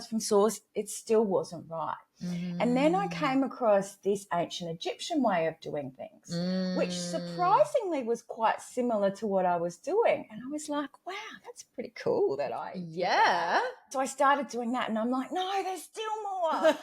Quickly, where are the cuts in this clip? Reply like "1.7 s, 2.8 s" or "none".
13.9 s